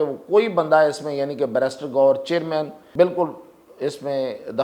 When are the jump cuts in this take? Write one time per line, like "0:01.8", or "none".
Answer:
0:02.8